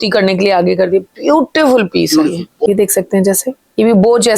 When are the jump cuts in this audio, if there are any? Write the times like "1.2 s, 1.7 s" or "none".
2.7 s